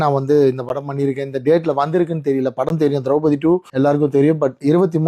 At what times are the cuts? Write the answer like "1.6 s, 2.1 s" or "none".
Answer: 3.7 s